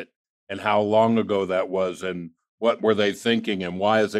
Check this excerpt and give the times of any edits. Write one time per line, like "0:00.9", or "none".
none

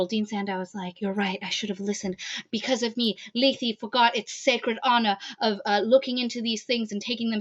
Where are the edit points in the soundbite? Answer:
0:00.9

